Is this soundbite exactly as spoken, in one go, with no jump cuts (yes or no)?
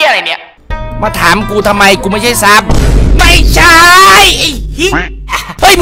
yes